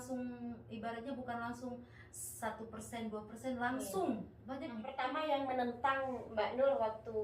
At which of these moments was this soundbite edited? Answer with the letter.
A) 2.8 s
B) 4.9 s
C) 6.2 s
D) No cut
B